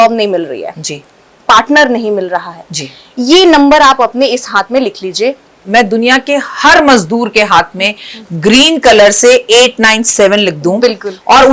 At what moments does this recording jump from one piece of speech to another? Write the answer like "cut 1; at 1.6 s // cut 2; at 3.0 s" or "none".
cut 1; at 1.3 s // cut 2; at 5.5 s